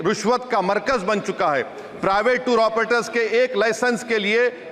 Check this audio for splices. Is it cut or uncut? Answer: uncut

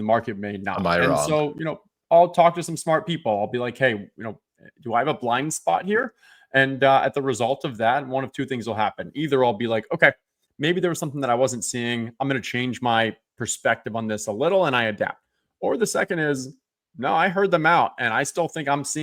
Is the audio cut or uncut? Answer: uncut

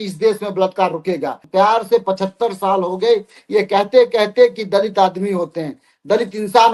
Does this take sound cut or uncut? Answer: cut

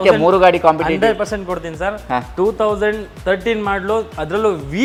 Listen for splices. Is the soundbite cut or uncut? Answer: uncut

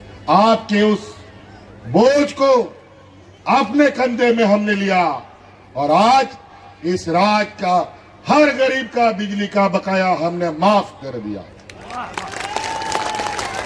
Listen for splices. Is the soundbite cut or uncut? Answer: uncut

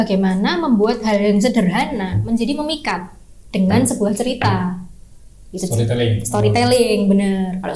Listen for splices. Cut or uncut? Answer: uncut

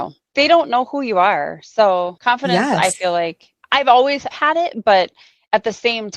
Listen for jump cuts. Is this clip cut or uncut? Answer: uncut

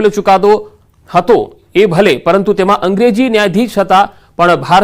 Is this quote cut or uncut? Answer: cut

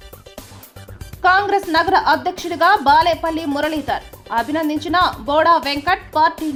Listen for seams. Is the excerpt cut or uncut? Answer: uncut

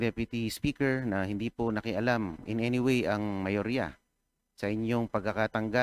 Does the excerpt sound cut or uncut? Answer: uncut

